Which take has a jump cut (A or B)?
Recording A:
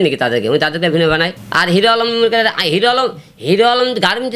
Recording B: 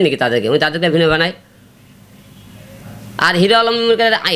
A